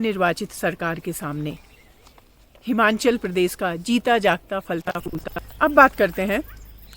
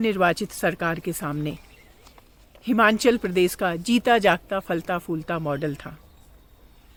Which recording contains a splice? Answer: first; 1 cut; at 4.9 s

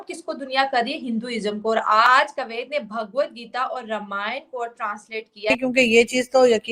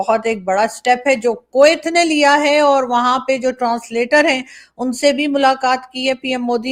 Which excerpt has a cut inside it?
first; 1 cut; at 5.5 s

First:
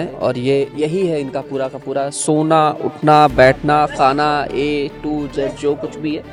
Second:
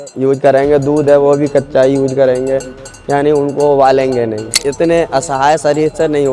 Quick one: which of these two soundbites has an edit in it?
second; 1 cut; at 4.5 s

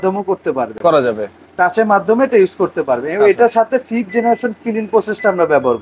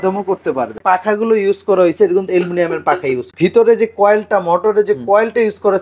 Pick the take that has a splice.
second; 2 cuts; at 0.8 s, 3.3 s

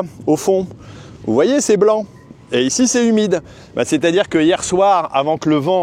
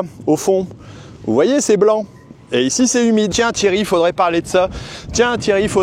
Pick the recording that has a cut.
second; 1 cut; at 3.3 s

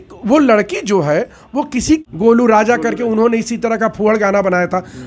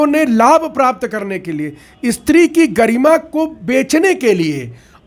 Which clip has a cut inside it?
first; 1 cut; at 2.0 s

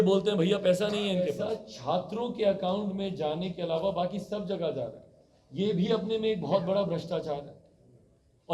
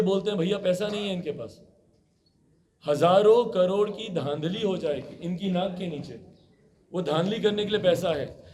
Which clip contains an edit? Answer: first; 1 cut; at 1.4 s

